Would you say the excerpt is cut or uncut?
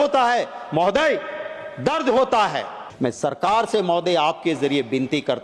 cut